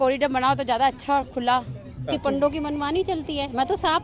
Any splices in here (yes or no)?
yes